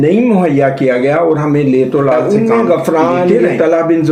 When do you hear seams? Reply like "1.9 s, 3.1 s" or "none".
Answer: 2.2 s